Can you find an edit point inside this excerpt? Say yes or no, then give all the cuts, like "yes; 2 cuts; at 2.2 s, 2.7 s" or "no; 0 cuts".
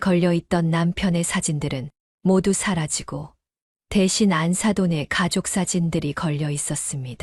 no; 0 cuts